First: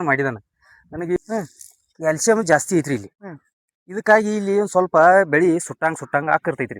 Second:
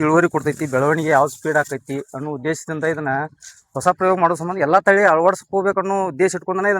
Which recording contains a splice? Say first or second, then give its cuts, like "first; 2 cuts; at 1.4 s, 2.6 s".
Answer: first; 1 cut; at 1.2 s